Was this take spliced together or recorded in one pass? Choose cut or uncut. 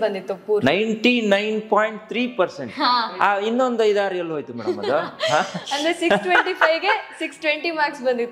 uncut